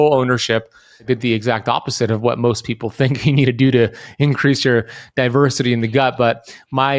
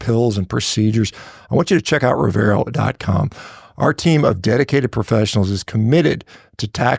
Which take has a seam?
first; 1 cut; at 1.0 s

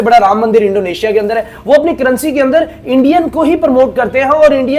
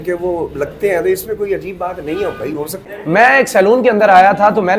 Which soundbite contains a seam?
second; 1 cut; at 2.9 s

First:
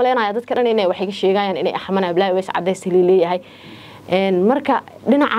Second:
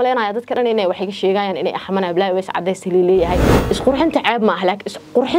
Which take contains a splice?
second; 1 cut; at 3.5 s

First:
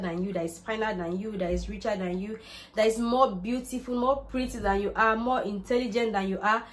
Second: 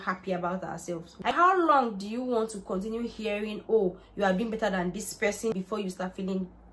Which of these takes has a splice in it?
second; 1 cut; at 1.3 s

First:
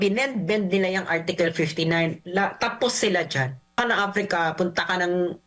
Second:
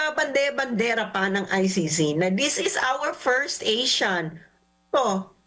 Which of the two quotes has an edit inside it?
first; 1 cut; at 3.8 s

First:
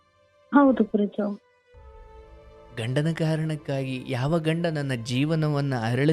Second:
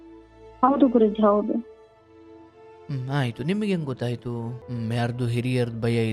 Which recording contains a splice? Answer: second; 1 cut; at 4.6 s

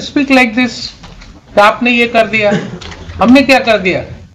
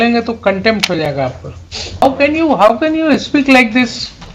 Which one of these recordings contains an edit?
second; 1 cut; at 2.0 s

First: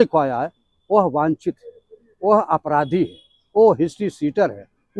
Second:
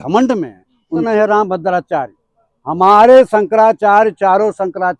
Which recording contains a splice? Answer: second; 1 cut; at 1.0 s

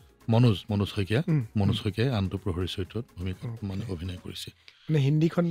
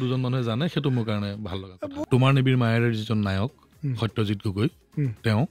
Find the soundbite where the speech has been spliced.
second; 1 cut; at 1.9 s

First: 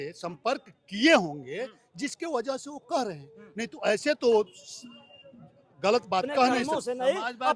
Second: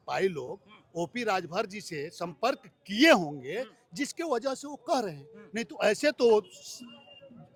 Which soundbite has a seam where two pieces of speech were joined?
first; 1 cut; at 6.6 s

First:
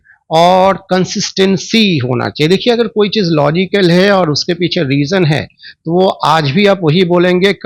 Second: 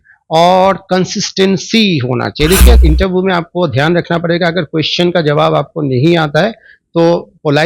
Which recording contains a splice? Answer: second; 1 cut; at 2.8 s

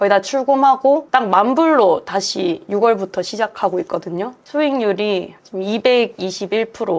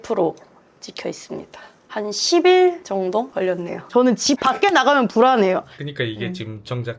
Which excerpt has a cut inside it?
second; 2 cuts; at 1.9 s, 3.9 s

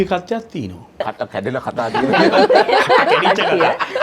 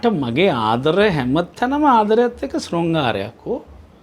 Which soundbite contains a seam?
first; 1 cut; at 1.0 s

